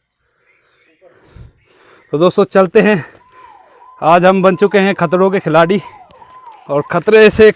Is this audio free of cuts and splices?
yes; 0 cuts

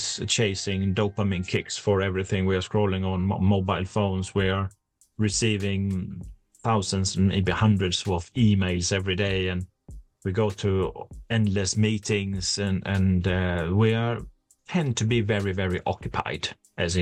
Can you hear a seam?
no; 0 cuts

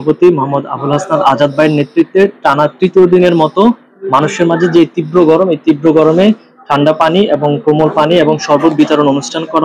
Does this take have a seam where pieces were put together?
no; 0 cuts

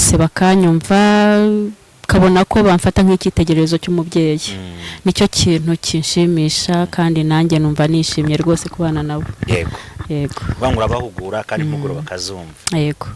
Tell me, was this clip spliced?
no; 0 cuts

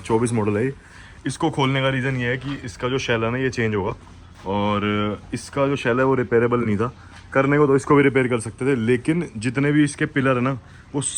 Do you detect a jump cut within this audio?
no; 0 cuts

